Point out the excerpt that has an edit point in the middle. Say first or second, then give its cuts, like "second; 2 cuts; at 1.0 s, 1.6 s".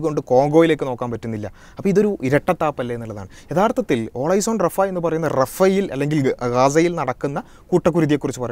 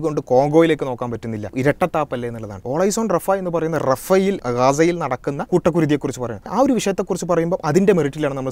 second; 5 cuts; at 1.5 s, 2.6 s, 4.4 s, 5.4 s, 6.5 s